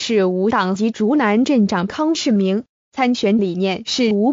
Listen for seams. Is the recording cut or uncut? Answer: cut